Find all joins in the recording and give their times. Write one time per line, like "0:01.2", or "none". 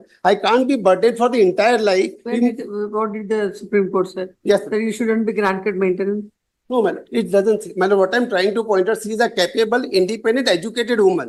none